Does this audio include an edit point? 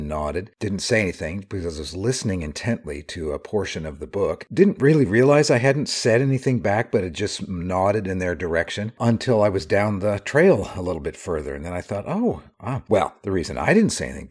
no; 0 cuts

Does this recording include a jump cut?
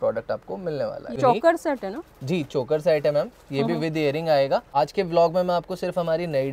yes; 2 cuts; at 1.2 s, 4.7 s

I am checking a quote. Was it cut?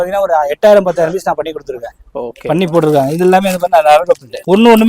no; 0 cuts

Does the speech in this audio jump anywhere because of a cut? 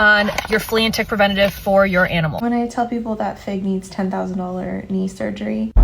yes; 1 cut; at 2.3 s

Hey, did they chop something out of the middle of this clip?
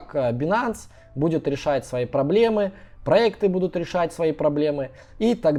no; 0 cuts

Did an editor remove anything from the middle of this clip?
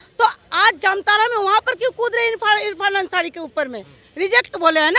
no; 0 cuts

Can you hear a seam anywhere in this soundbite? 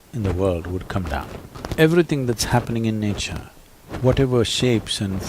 yes; 1 cut; at 1.6 s

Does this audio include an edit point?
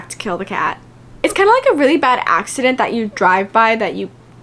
yes; 1 cut; at 1.1 s

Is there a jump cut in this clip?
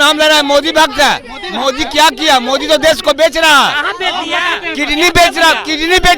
no; 0 cuts

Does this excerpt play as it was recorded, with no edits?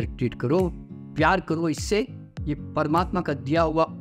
yes; 0 cuts

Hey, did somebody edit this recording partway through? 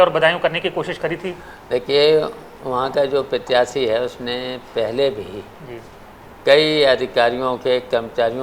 no; 0 cuts

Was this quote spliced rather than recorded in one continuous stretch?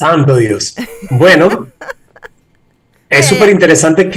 no; 0 cuts

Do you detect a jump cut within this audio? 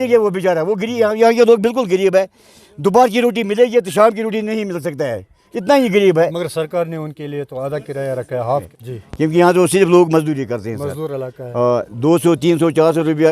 yes; 1 cut; at 8.7 s

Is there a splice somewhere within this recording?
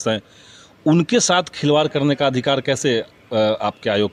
no; 0 cuts

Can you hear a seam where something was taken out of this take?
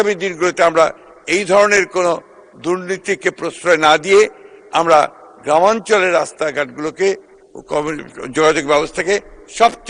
no; 0 cuts

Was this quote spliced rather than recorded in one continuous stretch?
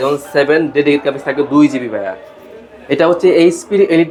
no; 0 cuts

